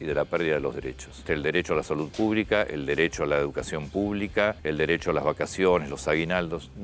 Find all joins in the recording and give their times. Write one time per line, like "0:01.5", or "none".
0:01.2
0:04.6